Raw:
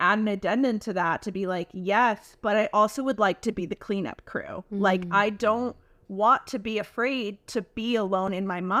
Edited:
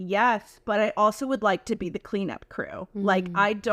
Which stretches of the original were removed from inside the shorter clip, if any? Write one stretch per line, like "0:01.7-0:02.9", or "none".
none